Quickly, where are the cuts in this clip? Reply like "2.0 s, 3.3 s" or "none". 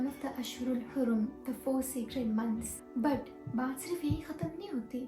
2.7 s